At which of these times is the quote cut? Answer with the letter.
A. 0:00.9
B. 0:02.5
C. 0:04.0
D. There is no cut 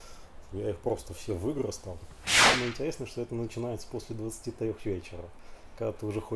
B